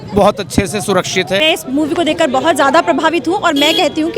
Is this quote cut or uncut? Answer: cut